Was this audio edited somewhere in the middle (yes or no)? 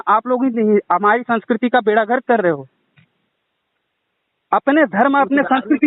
no